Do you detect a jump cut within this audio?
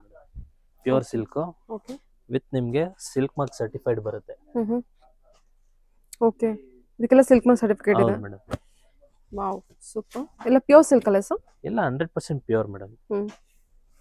no; 0 cuts

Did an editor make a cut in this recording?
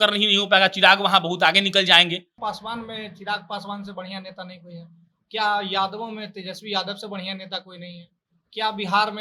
yes; 1 cut; at 2.3 s

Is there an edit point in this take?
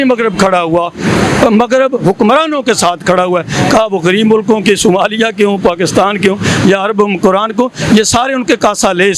no; 0 cuts

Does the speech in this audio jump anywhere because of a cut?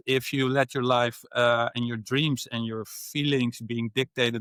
no; 0 cuts

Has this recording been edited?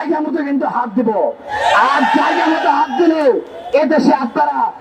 no; 0 cuts

